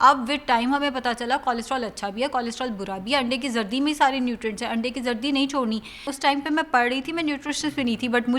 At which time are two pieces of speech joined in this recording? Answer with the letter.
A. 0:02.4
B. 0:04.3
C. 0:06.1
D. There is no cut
C